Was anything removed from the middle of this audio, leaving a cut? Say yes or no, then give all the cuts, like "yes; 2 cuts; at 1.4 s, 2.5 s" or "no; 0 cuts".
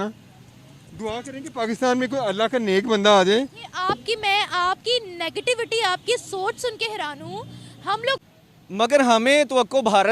yes; 1 cut; at 8.2 s